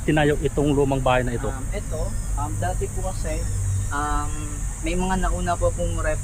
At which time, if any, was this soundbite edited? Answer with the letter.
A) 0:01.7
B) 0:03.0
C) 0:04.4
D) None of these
D